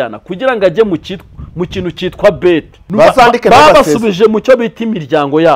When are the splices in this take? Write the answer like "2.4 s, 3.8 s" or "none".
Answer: 2.8 s

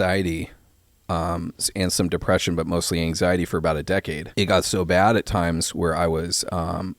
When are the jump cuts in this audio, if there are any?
4.2 s

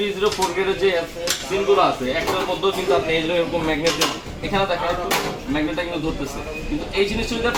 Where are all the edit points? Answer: none

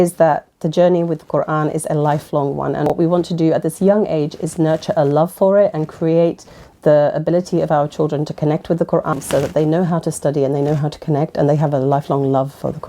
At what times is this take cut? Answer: 2.9 s, 9.2 s

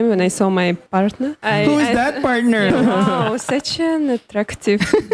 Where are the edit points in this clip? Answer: 1.0 s, 2.7 s

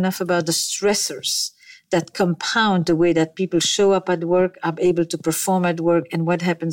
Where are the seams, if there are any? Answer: none

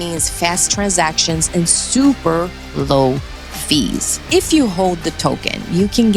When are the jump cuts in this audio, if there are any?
4.1 s

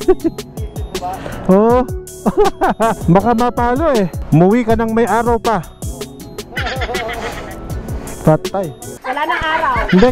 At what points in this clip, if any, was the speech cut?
8.9 s

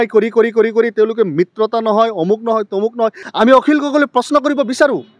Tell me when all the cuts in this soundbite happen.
3.2 s

